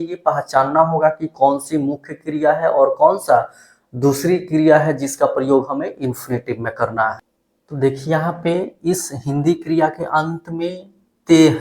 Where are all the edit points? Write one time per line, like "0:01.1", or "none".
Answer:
0:07.8